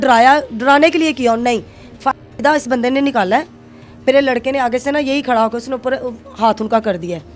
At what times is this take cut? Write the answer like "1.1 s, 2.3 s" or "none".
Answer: none